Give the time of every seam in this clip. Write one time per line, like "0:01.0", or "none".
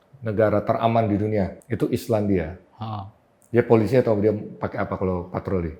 0:01.6